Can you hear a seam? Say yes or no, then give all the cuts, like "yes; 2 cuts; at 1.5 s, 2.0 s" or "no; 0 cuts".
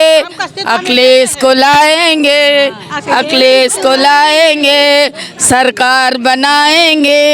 no; 0 cuts